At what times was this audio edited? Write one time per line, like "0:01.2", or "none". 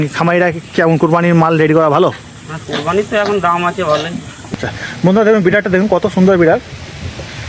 0:04.5